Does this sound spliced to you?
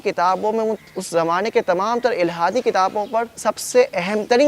yes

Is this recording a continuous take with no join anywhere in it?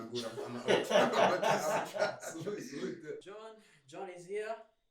no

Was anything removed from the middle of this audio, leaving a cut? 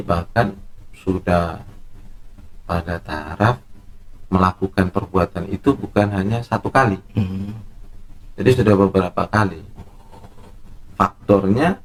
no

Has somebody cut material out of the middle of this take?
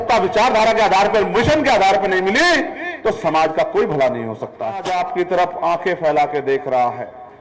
yes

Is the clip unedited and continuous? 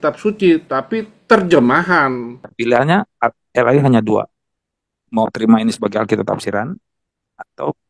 no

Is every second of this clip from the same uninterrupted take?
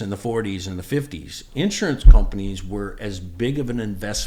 yes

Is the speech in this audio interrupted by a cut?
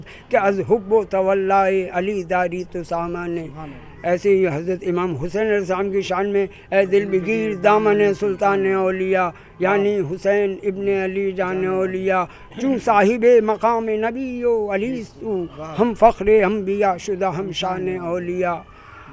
no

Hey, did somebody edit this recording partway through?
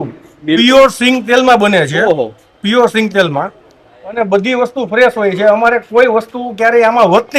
no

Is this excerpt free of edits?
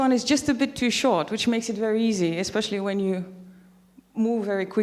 no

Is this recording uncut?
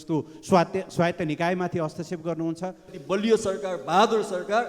no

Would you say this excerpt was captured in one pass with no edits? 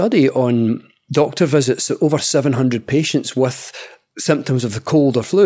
no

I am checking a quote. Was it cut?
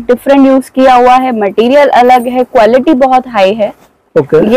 no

